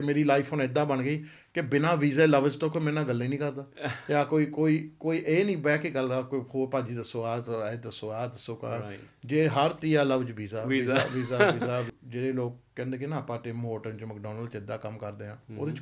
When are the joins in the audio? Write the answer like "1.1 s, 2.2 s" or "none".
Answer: 11.9 s